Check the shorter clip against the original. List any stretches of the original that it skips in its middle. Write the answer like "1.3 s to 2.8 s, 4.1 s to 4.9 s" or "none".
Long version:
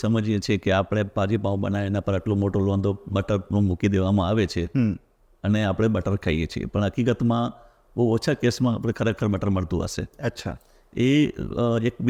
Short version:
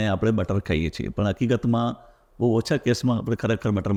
none